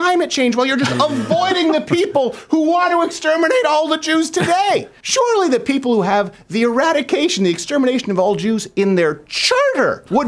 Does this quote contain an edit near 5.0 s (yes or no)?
yes